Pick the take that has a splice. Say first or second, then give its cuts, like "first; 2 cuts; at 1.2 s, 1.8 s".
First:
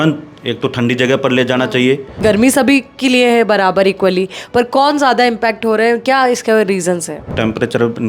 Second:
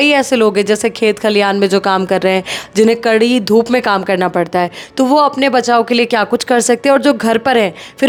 first; 2 cuts; at 2.1 s, 7.3 s